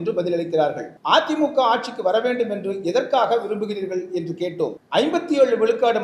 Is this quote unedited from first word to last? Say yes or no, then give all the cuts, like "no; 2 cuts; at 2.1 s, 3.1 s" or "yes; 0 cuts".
no; 2 cuts; at 0.9 s, 4.8 s